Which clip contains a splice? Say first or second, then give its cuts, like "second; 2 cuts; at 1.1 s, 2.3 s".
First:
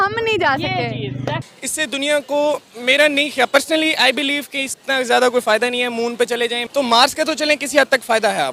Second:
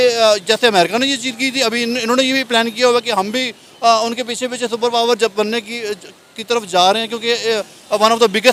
first; 2 cuts; at 1.4 s, 6.6 s